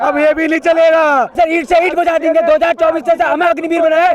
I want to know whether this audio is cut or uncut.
cut